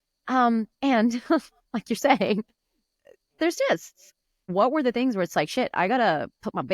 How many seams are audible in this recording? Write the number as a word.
one